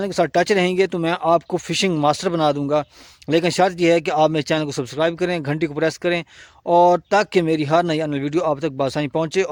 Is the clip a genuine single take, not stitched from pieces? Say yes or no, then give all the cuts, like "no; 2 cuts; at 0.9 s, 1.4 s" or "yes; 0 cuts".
yes; 0 cuts